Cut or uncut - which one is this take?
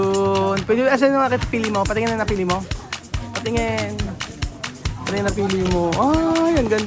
uncut